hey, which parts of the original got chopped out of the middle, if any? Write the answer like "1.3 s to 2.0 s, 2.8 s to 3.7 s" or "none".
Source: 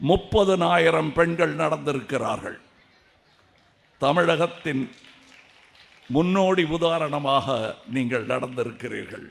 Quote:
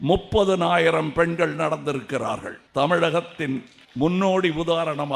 2.6 s to 3.8 s, 5.0 s to 5.9 s